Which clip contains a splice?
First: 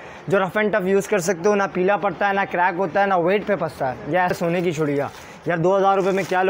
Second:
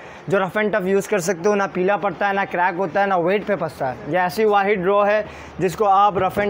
first; 1 cut; at 4.3 s

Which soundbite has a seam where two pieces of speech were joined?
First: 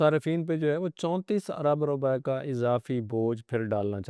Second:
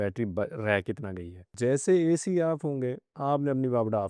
second; 2 cuts; at 1.5 s, 3.1 s

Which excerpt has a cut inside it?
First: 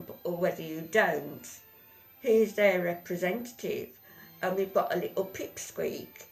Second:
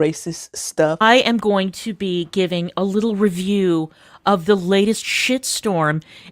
second; 1 cut; at 1.0 s

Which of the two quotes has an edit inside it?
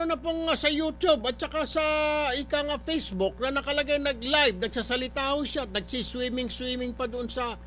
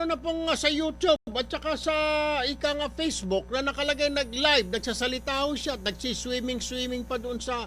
first; 1 cut; at 1.2 s

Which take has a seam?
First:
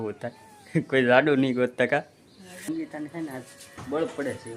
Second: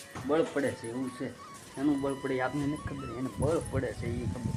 first; 1 cut; at 2.6 s

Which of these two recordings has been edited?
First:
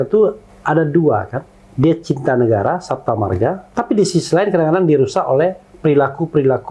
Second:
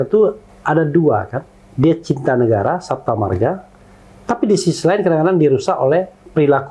first; 1 cut; at 3.6 s

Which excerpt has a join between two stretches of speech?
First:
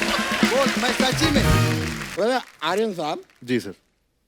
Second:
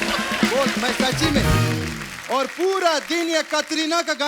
first; 1 cut; at 2.0 s

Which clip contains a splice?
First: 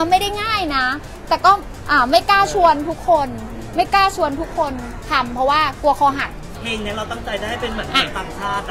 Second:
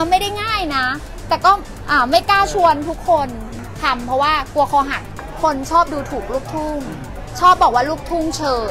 second; 2 cuts; at 3.6 s, 5.2 s

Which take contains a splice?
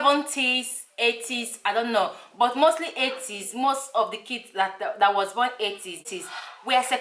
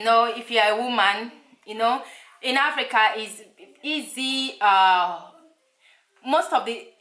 first; 1 cut; at 6.1 s

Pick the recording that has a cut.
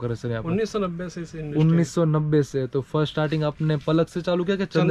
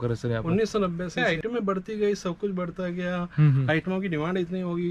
second; 1 cut; at 1.1 s

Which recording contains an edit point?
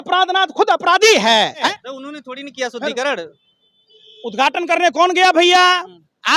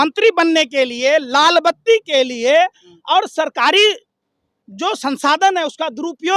first; 1 cut; at 1.7 s

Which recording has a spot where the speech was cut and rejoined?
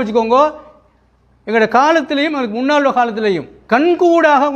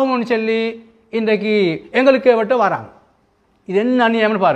first; 1 cut; at 3.6 s

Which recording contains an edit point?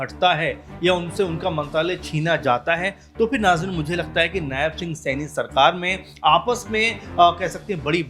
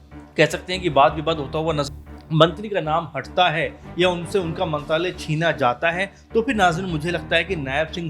second; 1 cut; at 1.9 s

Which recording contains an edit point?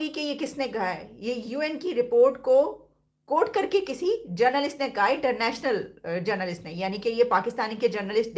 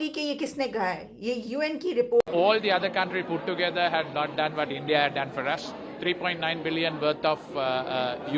second; 1 cut; at 2.2 s

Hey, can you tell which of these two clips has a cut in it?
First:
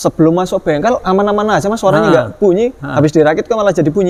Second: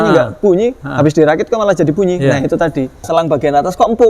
second; 1 cut; at 3.0 s

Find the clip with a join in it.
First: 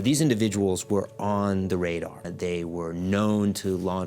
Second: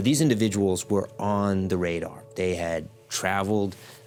first; 1 cut; at 2.2 s

